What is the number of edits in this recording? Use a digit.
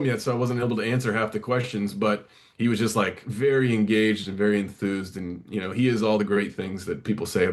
0